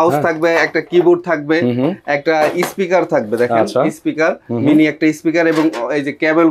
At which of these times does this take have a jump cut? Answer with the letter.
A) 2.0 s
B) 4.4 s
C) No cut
C